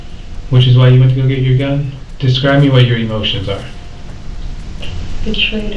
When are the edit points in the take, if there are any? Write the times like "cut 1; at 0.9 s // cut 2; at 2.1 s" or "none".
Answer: cut 1; at 4.8 s